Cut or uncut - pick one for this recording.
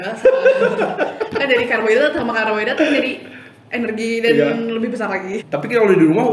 cut